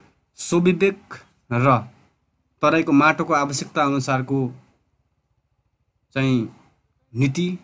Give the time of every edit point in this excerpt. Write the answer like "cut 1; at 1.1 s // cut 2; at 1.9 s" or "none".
none